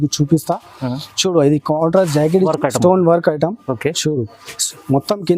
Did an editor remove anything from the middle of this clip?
yes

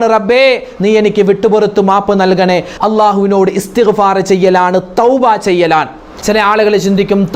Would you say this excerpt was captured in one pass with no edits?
no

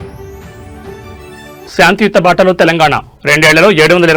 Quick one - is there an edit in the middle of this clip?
no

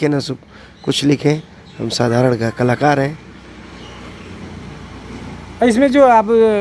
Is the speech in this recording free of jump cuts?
yes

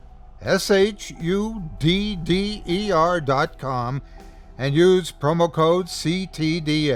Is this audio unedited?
yes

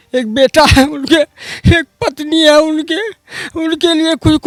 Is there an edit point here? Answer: no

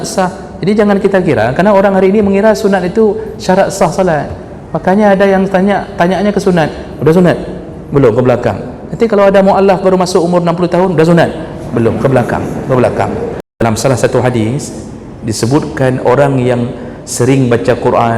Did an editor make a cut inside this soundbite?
yes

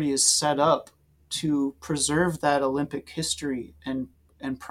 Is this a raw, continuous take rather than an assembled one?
yes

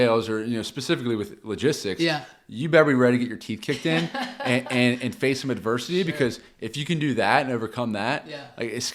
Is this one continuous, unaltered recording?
yes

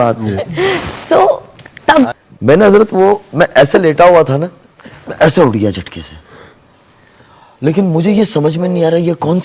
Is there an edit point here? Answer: yes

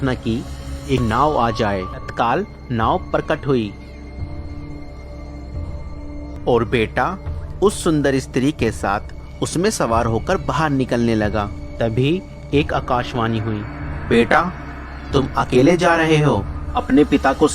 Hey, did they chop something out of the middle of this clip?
yes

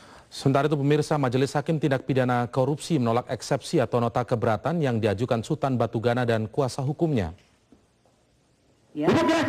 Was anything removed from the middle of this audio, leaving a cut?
no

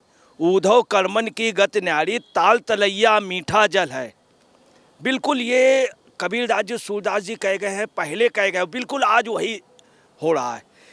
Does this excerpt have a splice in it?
no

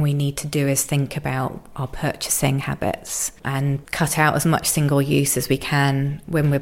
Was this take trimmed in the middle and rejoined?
yes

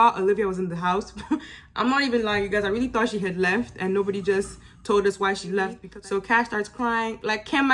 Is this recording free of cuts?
no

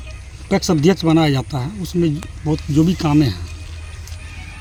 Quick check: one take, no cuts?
yes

